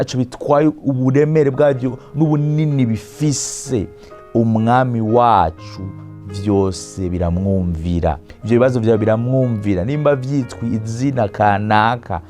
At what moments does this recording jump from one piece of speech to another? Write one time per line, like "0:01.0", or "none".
0:08.3